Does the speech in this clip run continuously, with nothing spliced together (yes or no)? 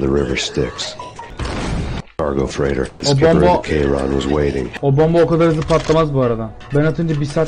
no